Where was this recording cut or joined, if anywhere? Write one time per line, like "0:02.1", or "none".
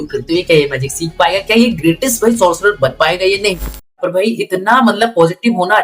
0:04.0